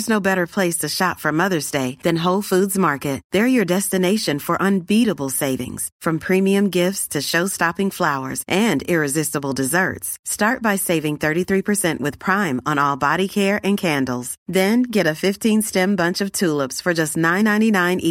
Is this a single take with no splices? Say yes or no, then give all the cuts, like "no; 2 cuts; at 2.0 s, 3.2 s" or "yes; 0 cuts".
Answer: yes; 0 cuts